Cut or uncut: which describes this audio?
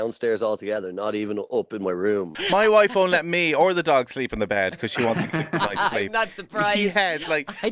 cut